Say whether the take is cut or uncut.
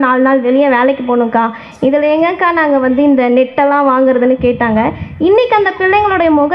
uncut